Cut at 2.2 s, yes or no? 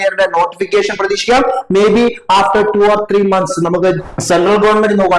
no